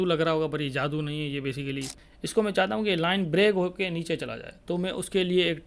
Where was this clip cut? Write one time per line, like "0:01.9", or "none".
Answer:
0:02.0